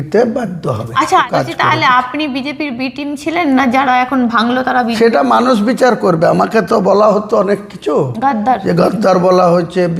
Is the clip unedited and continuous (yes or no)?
no